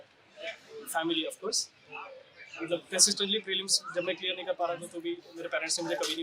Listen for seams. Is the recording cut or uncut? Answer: uncut